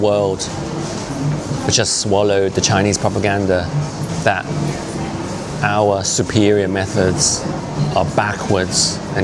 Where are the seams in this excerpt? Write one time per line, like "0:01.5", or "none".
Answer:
0:04.1
0:07.6